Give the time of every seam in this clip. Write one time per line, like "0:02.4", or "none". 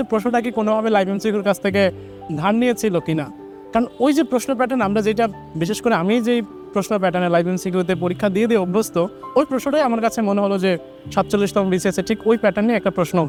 none